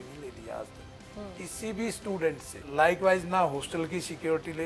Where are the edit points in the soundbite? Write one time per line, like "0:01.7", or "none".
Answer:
0:02.5